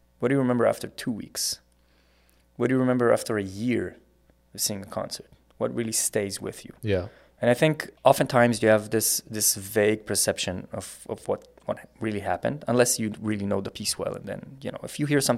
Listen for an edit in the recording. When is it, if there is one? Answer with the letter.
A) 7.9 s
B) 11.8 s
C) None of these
A